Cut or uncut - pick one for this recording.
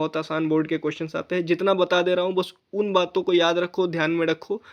uncut